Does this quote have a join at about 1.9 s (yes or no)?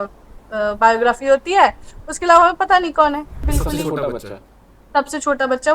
no